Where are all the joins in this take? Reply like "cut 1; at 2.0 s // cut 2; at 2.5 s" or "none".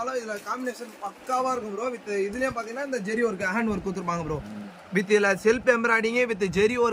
none